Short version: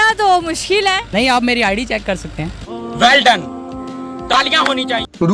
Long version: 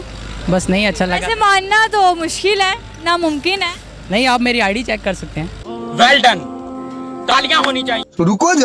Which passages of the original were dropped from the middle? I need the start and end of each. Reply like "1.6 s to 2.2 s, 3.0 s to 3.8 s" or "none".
2.8 s to 4.0 s